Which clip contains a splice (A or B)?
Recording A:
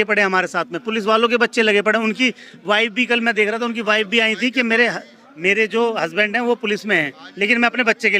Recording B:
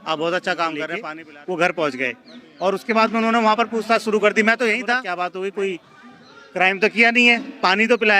B